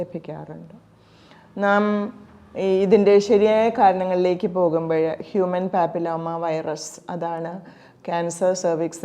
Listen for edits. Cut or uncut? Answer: uncut